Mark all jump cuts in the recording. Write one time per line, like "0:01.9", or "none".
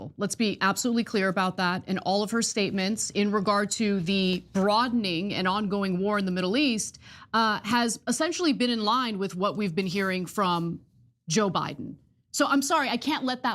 0:01.9